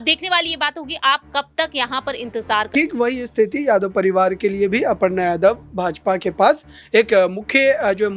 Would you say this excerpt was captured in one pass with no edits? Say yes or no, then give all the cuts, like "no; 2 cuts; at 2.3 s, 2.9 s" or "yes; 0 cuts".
no; 1 cut; at 2.7 s